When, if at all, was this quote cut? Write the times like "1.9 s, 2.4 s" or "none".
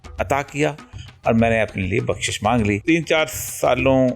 2.8 s